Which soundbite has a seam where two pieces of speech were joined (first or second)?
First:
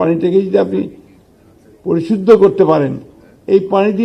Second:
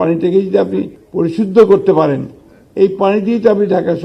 second